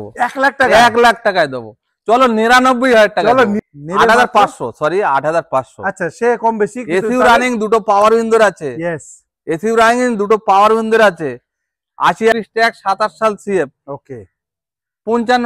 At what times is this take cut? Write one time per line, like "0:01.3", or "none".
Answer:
0:03.6
0:12.3

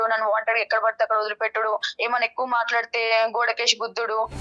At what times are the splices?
none

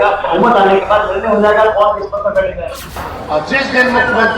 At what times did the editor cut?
0:03.0

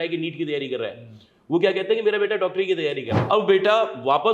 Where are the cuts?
0:03.1

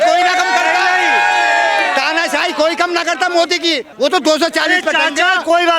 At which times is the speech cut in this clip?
0:03.9

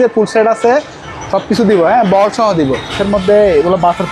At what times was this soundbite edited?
0:03.0

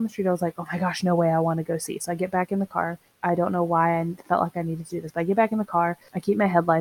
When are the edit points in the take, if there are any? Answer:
none

